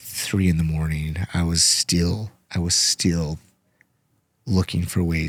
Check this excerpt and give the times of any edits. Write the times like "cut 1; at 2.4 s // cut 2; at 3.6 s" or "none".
none